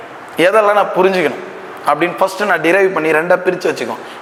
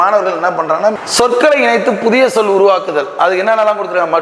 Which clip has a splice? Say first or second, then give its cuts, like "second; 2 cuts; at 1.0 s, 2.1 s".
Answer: second; 1 cut; at 1.0 s